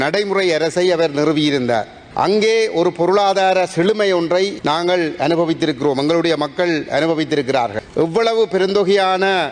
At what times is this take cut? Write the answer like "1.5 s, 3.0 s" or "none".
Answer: 2.0 s, 4.6 s, 7.8 s